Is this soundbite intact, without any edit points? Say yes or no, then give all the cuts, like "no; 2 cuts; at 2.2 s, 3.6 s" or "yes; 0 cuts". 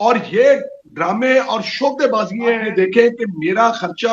no; 1 cut; at 2.6 s